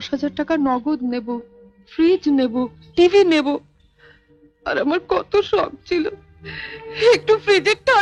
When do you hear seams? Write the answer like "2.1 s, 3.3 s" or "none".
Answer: none